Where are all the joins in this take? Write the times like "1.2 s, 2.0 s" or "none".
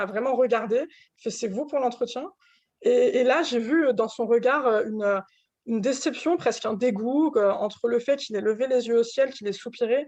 none